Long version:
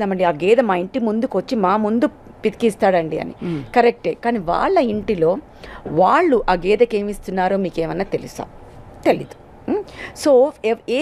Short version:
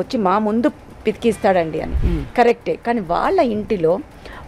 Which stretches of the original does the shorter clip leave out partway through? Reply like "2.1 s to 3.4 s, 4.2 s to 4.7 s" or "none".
none